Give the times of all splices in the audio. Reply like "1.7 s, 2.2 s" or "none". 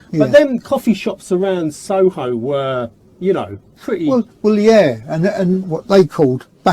5.7 s